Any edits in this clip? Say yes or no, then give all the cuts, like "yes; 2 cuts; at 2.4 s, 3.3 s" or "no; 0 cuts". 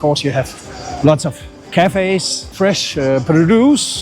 yes; 1 cut; at 2.5 s